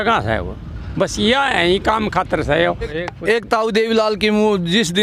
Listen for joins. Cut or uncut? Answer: cut